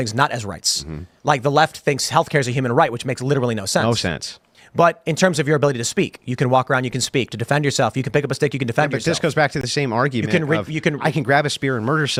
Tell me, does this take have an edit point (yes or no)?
no